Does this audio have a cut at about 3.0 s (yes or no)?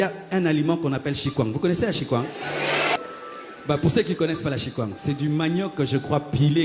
yes